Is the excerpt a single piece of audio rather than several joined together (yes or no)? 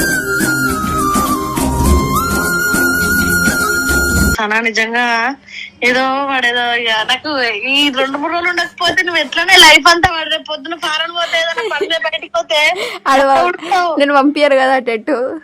no